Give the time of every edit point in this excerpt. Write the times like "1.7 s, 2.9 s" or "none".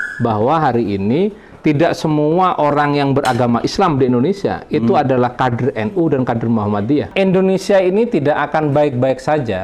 7.1 s